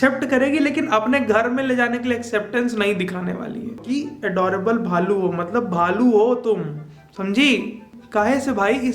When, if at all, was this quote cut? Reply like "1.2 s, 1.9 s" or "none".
3.8 s, 7.9 s

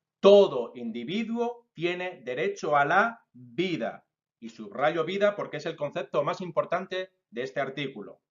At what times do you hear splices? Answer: 3.5 s

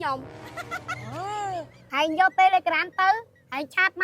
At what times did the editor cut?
1.8 s

